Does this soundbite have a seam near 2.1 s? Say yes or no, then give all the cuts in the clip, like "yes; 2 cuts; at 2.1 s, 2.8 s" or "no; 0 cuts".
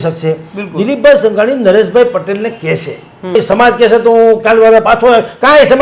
no; 1 cut; at 3.4 s